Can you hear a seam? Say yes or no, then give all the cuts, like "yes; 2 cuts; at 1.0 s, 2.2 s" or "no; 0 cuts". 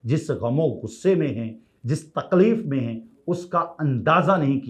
no; 0 cuts